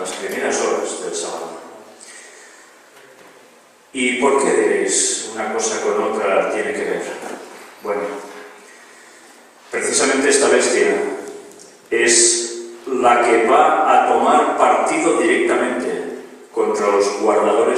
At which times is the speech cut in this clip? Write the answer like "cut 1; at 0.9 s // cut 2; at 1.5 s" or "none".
cut 1; at 15.9 s